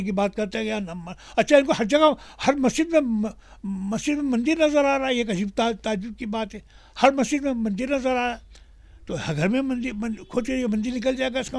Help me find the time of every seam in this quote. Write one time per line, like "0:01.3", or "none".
none